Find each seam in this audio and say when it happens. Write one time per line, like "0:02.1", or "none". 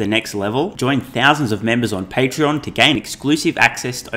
none

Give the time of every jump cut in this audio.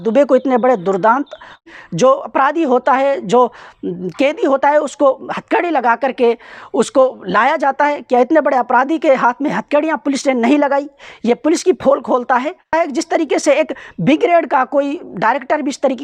0:01.6
0:12.7

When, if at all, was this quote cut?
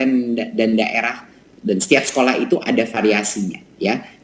none

